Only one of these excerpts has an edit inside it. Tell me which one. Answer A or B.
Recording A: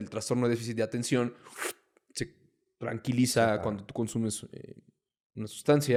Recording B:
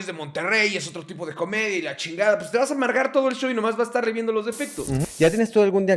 B